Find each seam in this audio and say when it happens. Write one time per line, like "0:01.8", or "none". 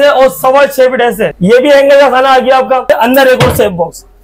0:01.3
0:02.8